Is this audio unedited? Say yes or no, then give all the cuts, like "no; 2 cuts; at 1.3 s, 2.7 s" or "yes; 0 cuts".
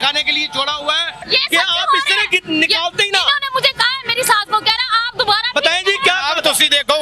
no; 1 cut; at 1.2 s